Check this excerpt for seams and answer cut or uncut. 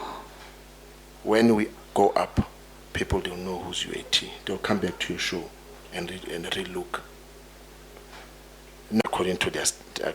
cut